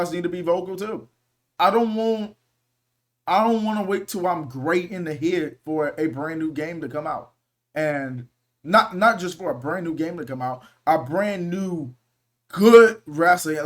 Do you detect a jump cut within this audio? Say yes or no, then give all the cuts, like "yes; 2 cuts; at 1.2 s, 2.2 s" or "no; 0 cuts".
yes; 1 cut; at 1.4 s